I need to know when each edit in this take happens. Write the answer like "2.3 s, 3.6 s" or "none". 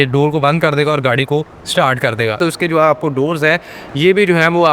2.4 s